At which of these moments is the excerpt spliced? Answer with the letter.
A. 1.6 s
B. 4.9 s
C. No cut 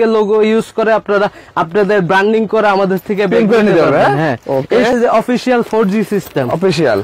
B